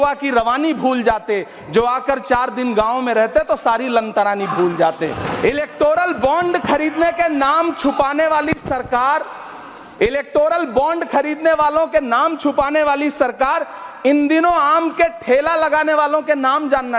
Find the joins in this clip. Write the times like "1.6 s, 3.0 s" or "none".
5.2 s